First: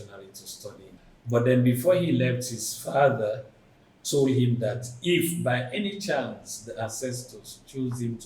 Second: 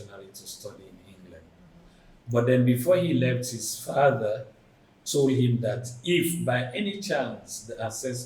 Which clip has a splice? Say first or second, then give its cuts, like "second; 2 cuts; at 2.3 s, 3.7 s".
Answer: first; 1 cut; at 1.0 s